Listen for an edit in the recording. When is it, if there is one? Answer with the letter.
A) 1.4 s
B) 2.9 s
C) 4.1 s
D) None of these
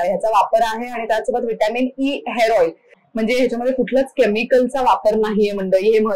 B